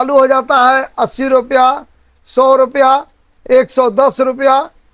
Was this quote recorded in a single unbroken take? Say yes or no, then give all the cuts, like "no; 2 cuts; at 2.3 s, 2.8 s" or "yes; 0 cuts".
yes; 0 cuts